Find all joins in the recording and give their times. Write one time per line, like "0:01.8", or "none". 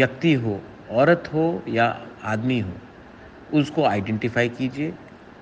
none

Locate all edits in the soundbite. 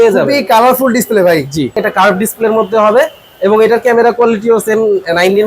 0:01.8

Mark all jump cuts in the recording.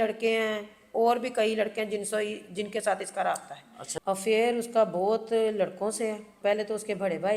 0:03.9
0:06.3

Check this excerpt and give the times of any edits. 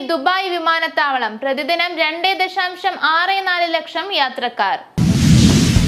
0:04.9

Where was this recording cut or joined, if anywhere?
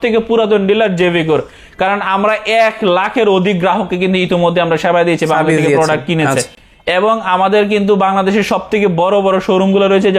none

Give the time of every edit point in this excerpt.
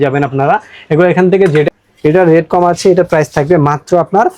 0:01.7

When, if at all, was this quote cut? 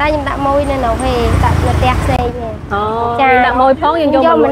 none

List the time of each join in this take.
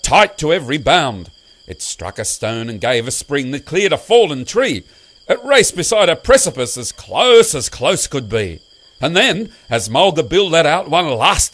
0:02.1

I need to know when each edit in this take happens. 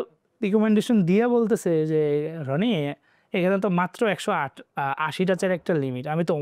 none

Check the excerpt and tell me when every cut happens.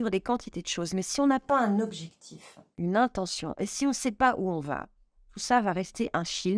none

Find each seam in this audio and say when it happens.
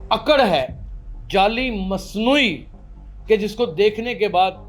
none

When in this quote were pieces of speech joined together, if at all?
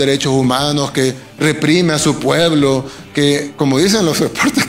none

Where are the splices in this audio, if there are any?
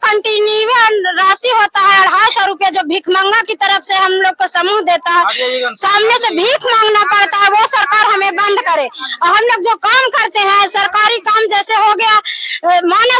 none

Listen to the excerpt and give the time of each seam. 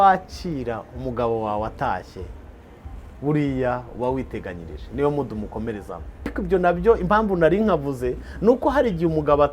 0:06.4

